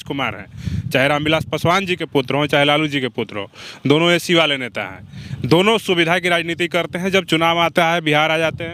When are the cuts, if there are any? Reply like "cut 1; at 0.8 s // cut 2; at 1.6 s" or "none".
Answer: none